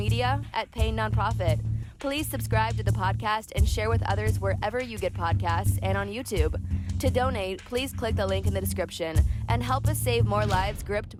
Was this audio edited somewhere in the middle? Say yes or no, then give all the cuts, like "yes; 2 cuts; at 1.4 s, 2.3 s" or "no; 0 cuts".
no; 0 cuts